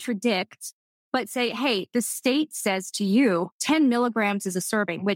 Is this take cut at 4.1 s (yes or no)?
no